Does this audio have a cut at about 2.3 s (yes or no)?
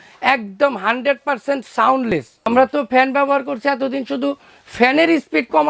yes